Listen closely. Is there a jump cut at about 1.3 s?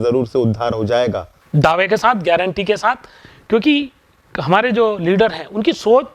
yes; 1 cut; at 1.3 s

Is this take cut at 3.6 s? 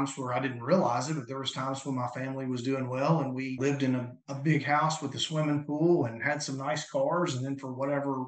yes; 1 cut; at 3.6 s

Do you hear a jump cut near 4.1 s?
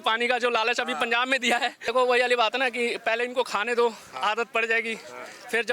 no; 1 cut; at 1.8 s

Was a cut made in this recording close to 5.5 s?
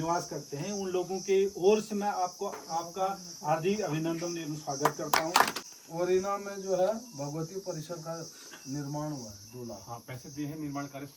yes; 1 cut; at 5.5 s

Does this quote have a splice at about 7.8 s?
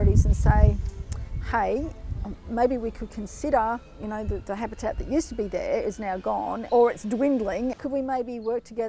yes; 3 cuts; at 3.9 s, 6.6 s, 7.8 s

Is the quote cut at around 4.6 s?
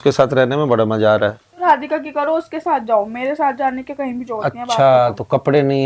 no; 1 cut; at 1.6 s

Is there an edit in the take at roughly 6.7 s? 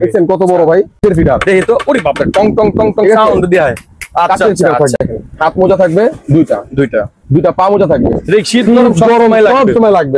no; 2 cuts; at 1.0 s, 5.0 s

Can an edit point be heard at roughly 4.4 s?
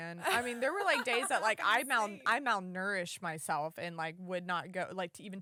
no; 0 cuts

